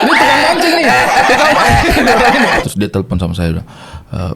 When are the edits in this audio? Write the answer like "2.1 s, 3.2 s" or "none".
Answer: 2.6 s